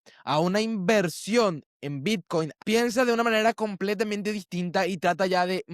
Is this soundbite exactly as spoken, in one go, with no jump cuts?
no; 1 cut; at 2.6 s

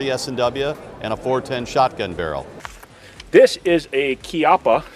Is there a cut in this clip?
yes; 1 cut; at 2.6 s

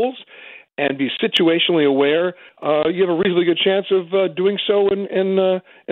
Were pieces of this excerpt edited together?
yes; 1 cut; at 2.5 s

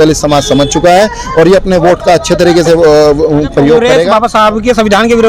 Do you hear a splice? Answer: yes; 1 cut; at 4.1 s

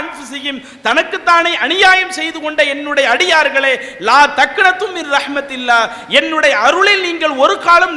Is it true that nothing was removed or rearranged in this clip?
yes; 0 cuts

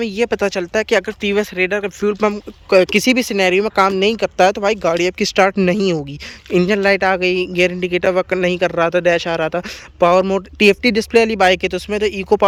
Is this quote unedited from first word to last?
yes; 0 cuts

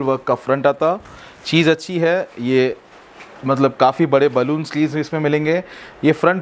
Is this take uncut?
yes; 0 cuts

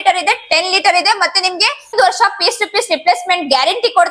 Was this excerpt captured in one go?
no; 1 cut; at 1.9 s

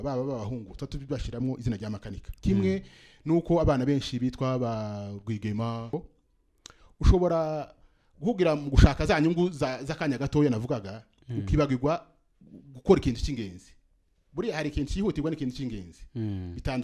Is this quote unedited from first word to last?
no; 1 cut; at 5.9 s

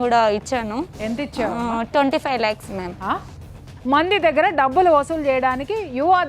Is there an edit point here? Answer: yes; 1 cut; at 3.4 s

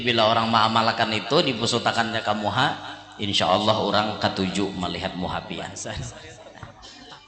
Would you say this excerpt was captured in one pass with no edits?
no; 1 cut; at 6.3 s

